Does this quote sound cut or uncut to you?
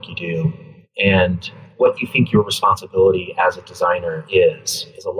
uncut